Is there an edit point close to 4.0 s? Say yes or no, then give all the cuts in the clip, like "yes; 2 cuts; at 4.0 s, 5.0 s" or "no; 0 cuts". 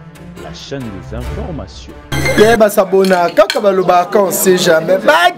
no; 1 cut; at 1.7 s